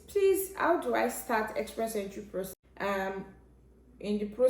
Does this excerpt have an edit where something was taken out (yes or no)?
yes